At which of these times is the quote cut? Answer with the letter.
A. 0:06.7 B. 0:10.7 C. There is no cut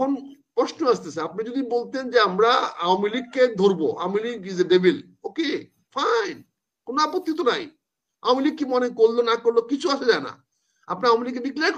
C